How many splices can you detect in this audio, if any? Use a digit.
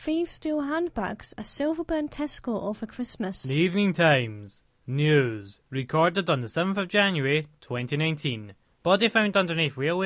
1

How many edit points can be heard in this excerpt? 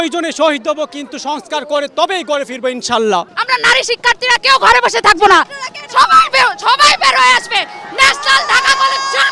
1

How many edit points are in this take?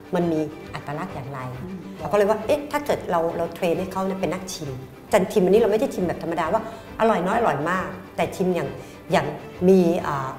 1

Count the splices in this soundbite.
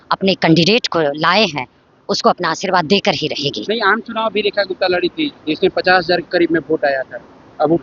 0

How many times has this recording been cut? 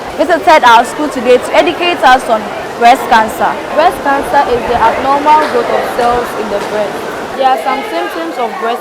1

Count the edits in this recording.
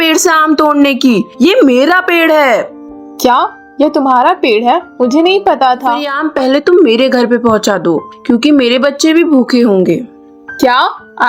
1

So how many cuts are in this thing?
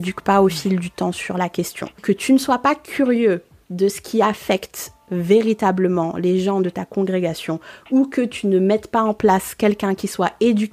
1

